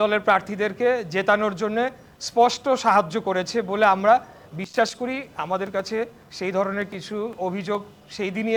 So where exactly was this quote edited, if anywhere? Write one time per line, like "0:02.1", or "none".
none